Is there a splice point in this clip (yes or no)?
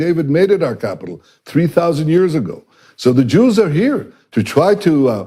no